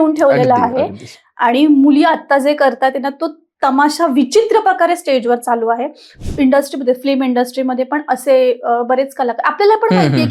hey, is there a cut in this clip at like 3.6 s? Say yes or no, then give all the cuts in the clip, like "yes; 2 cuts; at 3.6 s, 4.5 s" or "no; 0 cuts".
no; 1 cut; at 6.2 s